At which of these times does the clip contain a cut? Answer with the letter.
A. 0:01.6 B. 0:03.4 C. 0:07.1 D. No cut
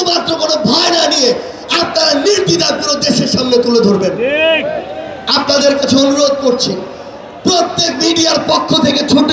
D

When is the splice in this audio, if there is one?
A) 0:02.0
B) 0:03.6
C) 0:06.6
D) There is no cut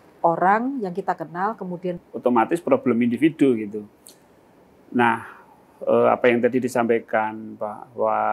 A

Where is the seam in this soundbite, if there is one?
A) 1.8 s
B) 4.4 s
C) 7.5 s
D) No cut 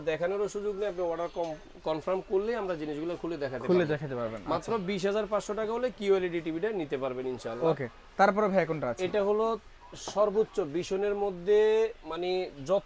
D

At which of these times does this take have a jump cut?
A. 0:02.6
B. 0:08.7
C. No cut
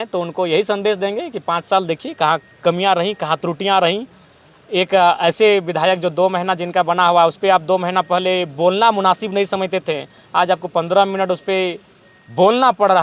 C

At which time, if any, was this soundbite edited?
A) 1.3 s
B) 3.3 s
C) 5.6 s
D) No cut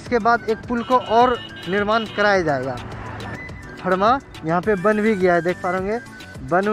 B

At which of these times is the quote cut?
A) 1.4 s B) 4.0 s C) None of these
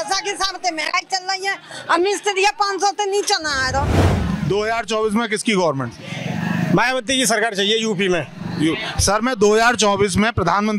B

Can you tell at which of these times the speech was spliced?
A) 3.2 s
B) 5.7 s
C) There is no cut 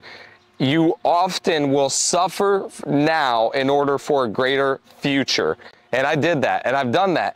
C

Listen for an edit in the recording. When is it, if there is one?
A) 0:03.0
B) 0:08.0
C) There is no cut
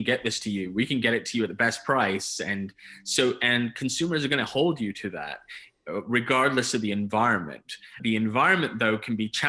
B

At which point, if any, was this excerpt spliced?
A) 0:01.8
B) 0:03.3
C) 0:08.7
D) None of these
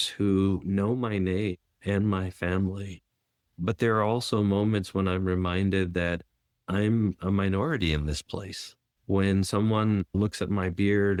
D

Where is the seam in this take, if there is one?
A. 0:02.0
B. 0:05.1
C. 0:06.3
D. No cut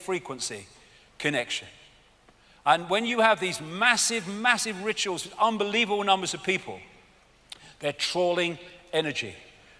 C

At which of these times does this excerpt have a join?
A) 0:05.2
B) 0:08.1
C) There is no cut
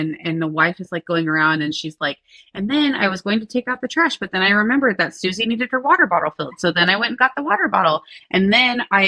C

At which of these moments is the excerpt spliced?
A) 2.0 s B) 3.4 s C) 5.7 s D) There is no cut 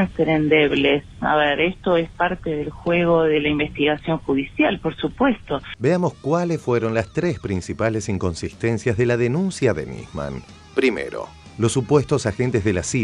D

